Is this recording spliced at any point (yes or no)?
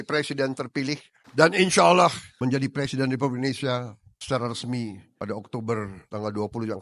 yes